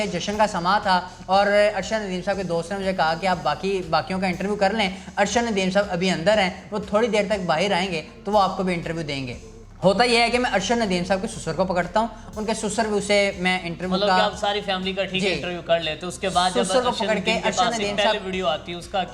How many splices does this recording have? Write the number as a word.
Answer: zero